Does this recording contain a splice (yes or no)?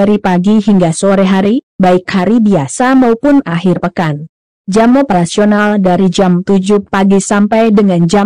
no